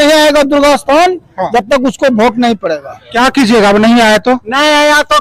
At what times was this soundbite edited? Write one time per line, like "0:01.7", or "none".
0:03.0

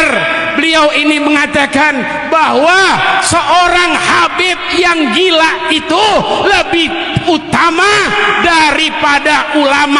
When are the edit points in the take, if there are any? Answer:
none

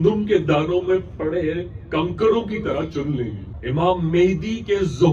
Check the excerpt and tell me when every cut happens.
0:03.5

